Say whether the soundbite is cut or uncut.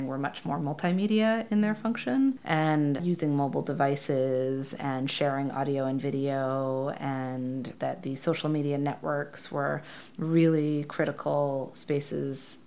uncut